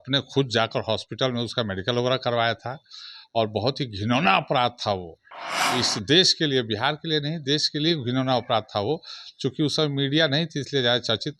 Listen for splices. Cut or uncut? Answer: uncut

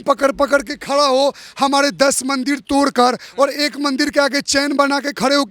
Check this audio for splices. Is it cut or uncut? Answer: uncut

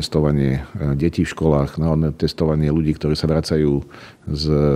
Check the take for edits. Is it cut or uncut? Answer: uncut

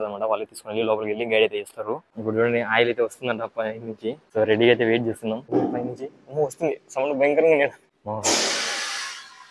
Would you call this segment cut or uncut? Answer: cut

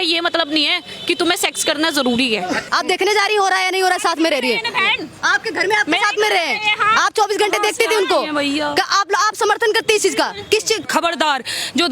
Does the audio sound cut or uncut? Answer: cut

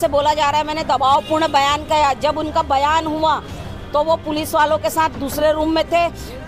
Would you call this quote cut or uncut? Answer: uncut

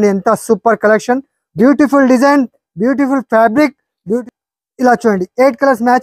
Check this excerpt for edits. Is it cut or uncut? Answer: cut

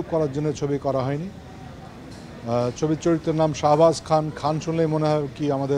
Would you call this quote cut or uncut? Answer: uncut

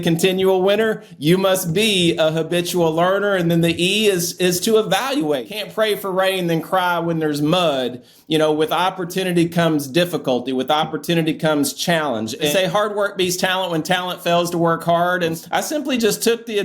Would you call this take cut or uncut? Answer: cut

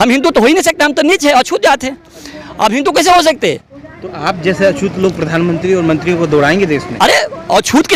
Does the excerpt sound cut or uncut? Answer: uncut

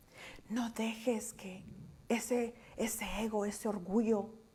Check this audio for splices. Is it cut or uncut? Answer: uncut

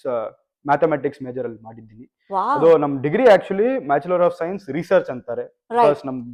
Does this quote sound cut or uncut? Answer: uncut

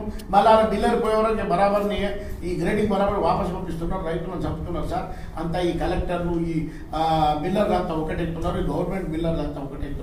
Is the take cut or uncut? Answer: uncut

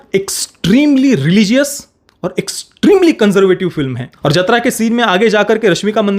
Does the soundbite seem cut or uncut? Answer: cut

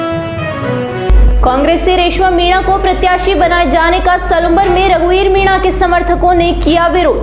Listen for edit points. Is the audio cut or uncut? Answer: cut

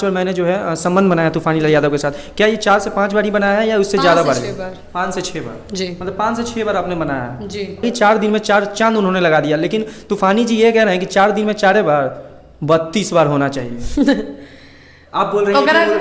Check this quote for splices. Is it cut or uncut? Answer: cut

